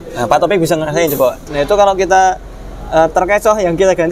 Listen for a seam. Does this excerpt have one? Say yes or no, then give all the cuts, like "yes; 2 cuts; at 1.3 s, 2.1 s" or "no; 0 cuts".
yes; 1 cut; at 1.5 s